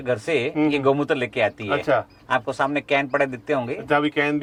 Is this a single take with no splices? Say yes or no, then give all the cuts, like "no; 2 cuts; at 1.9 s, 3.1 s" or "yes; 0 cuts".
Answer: yes; 0 cuts